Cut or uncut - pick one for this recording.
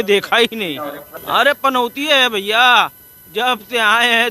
cut